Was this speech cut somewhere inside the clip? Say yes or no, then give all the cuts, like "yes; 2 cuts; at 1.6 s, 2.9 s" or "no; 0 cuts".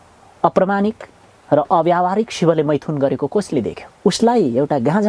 yes; 1 cut; at 3.8 s